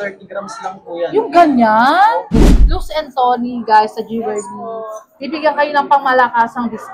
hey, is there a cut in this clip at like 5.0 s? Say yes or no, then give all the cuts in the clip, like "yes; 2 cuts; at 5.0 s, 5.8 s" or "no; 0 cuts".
no; 1 cut; at 2.5 s